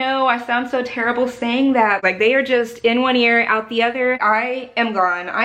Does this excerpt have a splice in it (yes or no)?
yes